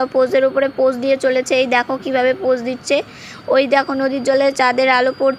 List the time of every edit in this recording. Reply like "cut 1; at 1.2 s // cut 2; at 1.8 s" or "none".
none